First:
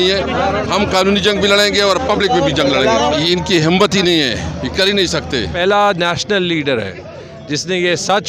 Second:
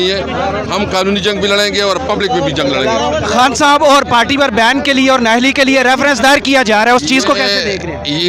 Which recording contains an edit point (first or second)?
first